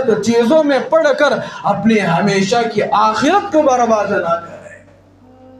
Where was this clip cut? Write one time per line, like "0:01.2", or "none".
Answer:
none